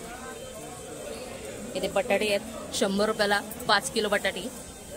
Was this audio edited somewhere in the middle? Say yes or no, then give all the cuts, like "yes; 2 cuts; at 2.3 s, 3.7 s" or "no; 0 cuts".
yes; 1 cut; at 1.1 s